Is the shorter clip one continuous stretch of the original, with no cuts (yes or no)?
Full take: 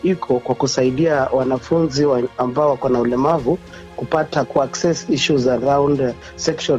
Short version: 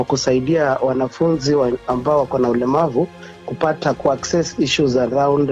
yes